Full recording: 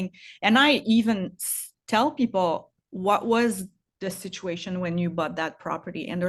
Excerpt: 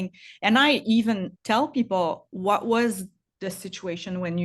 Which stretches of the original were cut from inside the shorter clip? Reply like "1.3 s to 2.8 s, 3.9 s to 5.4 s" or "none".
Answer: 1.3 s to 1.8 s, 2.7 s to 2.9 s